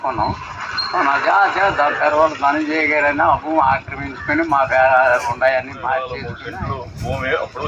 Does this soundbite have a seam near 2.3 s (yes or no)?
no